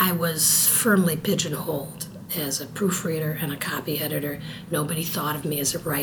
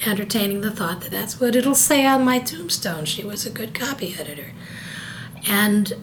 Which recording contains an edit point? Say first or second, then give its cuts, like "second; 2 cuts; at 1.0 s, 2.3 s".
second; 1 cut; at 1.2 s